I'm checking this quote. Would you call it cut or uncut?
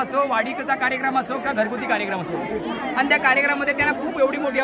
uncut